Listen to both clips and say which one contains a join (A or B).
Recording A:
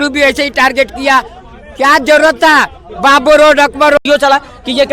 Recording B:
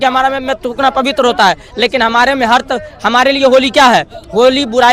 A